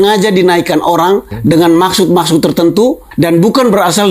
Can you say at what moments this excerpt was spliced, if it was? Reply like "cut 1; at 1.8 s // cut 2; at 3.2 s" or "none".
cut 1; at 1.3 s // cut 2; at 3.1 s